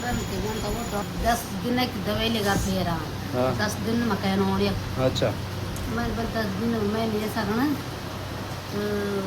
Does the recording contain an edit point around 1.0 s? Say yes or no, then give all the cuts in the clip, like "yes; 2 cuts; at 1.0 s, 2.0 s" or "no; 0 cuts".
yes; 1 cut; at 1.0 s